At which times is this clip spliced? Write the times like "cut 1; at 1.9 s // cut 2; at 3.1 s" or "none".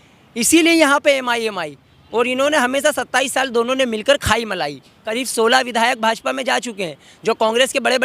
cut 1; at 5.2 s